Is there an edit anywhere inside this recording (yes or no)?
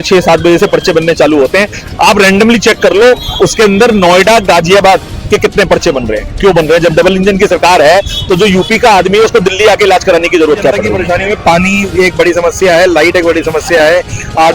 yes